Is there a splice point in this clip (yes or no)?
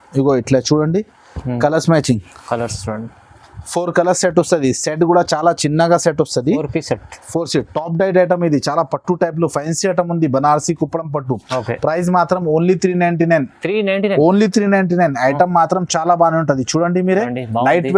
no